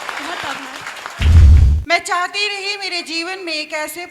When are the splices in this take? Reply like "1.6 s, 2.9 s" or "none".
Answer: 1.5 s

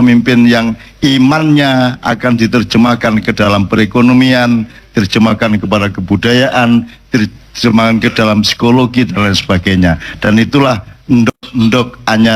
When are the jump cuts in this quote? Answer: none

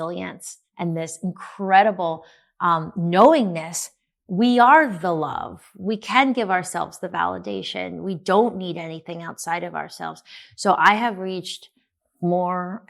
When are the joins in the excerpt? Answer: none

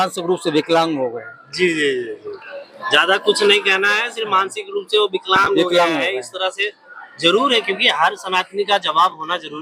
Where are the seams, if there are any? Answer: none

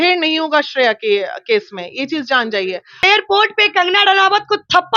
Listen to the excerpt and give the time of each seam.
3.0 s

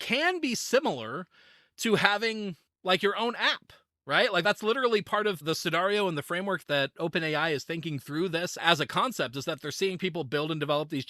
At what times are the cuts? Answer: 5.4 s

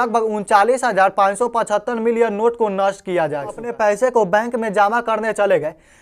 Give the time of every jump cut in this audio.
3.7 s

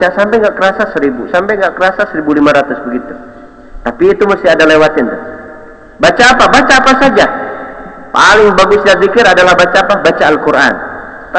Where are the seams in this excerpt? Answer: none

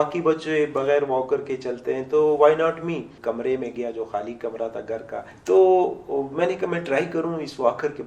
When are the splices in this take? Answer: 3.1 s, 5.3 s

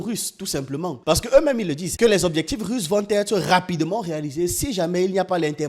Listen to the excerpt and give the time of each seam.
1.8 s

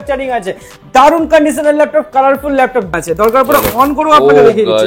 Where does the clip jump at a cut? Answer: 2.9 s

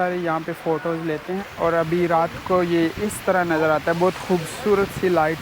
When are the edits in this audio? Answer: 1.4 s

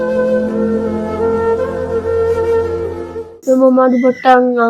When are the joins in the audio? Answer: none

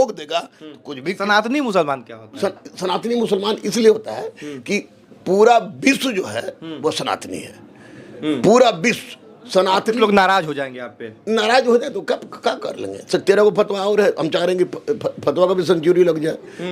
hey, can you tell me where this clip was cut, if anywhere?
none

